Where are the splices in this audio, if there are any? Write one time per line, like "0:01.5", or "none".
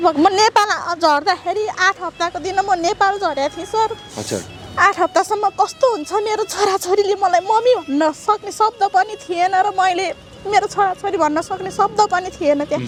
none